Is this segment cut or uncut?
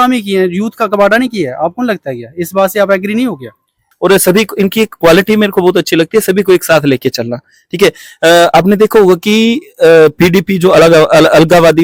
uncut